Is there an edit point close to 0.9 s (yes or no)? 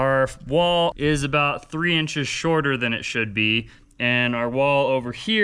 yes